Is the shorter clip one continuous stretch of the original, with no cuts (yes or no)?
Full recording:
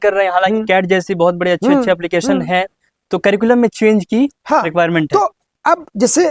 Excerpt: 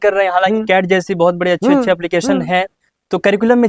yes